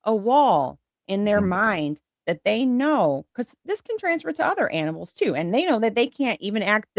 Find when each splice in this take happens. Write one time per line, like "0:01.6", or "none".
none